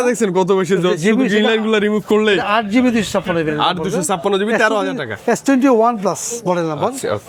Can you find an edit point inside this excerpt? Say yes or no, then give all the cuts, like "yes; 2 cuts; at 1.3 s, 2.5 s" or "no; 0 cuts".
no; 0 cuts